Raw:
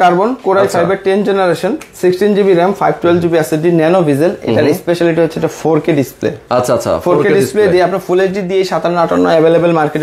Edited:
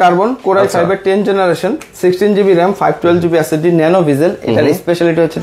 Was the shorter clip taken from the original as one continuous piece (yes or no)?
yes